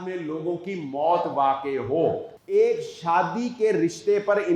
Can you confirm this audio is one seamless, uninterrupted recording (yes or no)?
no